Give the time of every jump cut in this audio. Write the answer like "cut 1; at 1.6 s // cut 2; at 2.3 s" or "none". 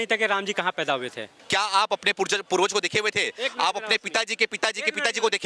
cut 1; at 1.2 s